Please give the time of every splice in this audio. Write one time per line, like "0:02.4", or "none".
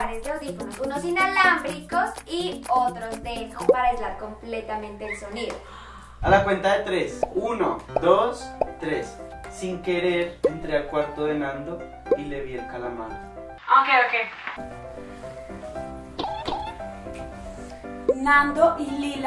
0:06.2
0:13.2